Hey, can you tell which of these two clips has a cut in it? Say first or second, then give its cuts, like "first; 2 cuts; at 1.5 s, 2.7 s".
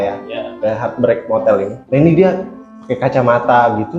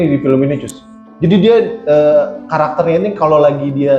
first; 1 cut; at 1.8 s